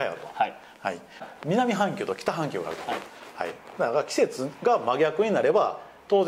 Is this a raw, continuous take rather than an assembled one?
no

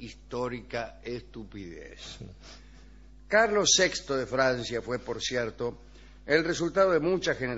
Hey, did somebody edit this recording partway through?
no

